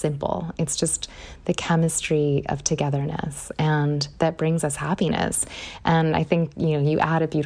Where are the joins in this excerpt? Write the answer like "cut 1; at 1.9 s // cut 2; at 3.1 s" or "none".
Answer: none